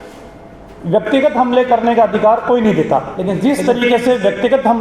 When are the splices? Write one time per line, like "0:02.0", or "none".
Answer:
0:03.2